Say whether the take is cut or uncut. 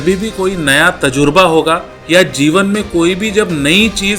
cut